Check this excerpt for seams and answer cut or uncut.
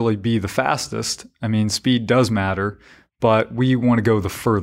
uncut